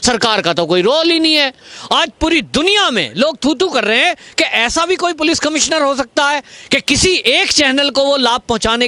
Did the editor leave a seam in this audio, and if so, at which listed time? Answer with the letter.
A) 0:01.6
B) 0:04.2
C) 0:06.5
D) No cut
A